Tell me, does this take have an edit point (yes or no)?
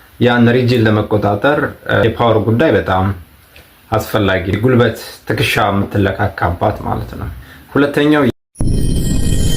yes